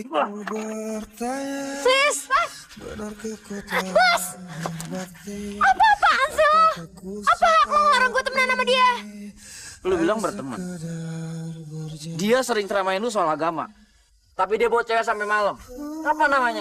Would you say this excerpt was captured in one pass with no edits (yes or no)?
yes